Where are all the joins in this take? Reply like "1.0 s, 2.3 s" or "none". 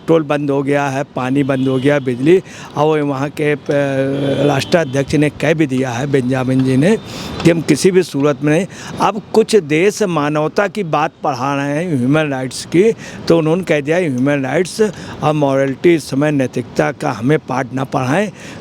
none